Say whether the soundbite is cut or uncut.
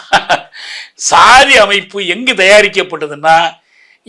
uncut